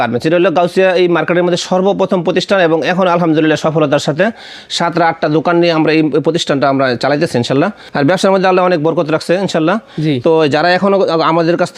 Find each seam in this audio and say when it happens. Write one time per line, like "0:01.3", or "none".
0:07.9